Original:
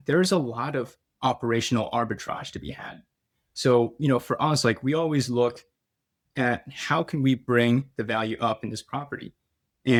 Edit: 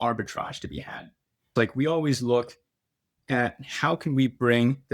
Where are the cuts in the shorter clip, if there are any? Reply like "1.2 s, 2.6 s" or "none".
1.5 s